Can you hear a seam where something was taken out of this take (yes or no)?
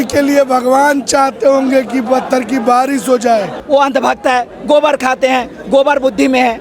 yes